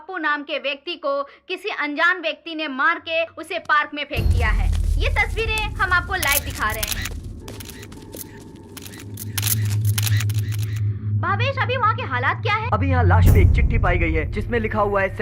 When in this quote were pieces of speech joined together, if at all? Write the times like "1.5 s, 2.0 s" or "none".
none

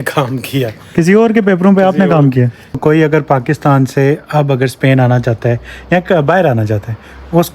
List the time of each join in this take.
2.7 s

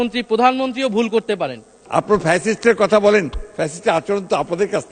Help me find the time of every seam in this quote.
1.8 s

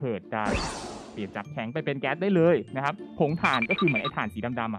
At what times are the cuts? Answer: 3.0 s

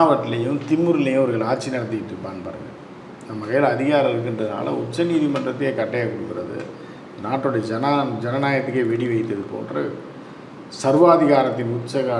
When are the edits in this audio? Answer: none

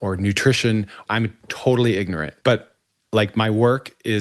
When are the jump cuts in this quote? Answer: 1.0 s, 2.3 s

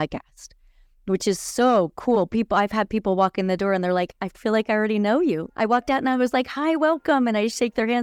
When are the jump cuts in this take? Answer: none

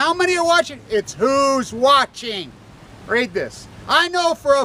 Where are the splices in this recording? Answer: none

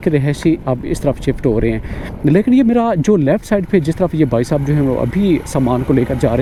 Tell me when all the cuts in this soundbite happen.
none

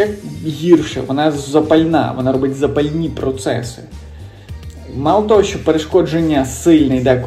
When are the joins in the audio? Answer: none

